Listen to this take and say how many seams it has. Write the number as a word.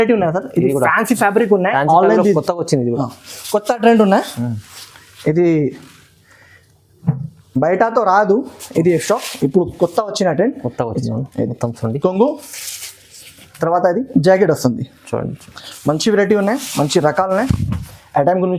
zero